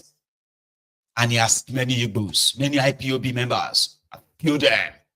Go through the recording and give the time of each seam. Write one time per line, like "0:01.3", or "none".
0:01.7

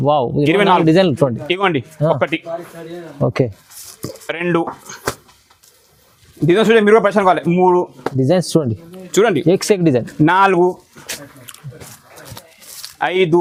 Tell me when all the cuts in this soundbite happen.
none

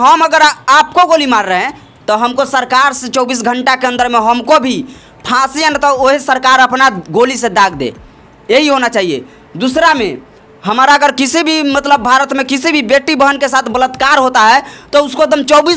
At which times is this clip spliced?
none

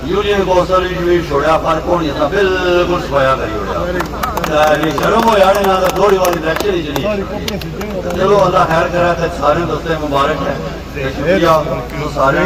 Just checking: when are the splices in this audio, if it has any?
none

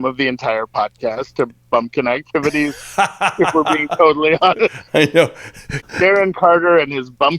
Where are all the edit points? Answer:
0:05.8

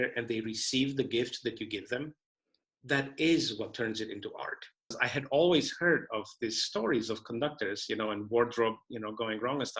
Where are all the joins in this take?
0:05.0

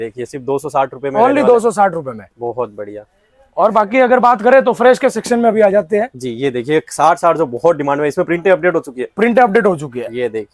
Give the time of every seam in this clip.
none

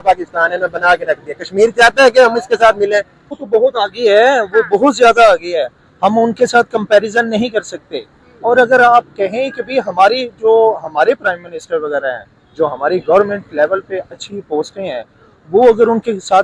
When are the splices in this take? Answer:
0:03.4

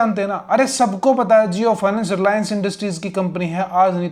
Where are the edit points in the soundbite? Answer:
none

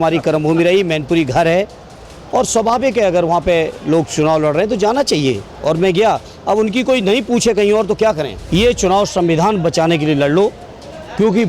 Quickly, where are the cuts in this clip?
0:08.4

